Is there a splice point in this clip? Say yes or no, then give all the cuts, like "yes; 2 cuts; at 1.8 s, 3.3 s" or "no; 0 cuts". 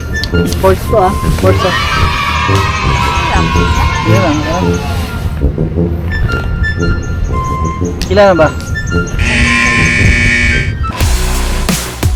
no; 0 cuts